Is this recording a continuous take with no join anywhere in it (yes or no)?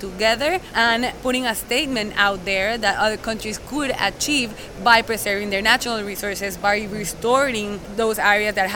no